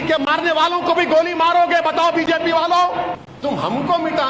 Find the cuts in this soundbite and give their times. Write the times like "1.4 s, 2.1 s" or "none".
3.3 s